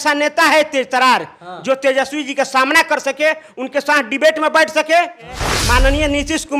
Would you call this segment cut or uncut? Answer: cut